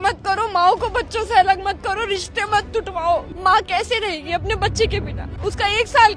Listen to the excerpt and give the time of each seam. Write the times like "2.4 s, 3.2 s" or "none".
3.3 s